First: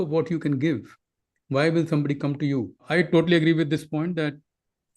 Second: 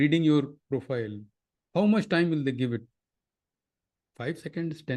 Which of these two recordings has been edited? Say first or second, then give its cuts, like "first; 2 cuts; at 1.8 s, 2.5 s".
first; 1 cut; at 2.8 s